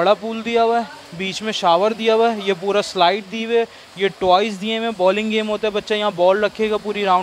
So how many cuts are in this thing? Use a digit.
0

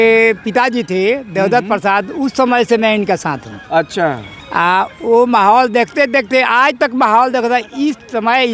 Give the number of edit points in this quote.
0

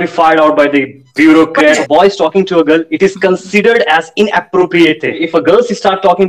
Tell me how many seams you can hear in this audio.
2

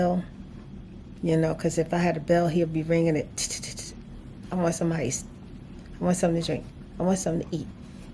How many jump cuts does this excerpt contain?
0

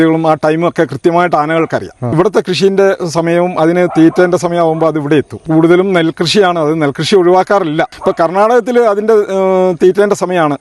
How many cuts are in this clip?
3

